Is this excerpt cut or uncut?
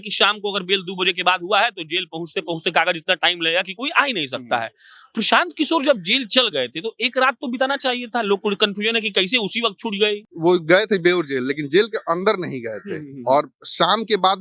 cut